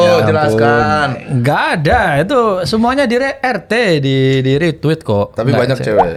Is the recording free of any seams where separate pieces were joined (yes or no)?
yes